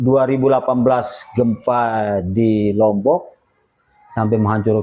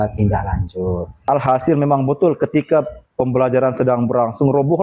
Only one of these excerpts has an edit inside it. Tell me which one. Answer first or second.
second